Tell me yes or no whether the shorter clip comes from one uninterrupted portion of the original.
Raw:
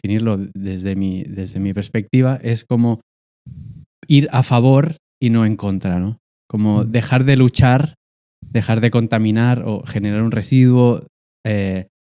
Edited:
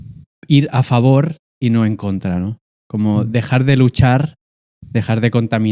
yes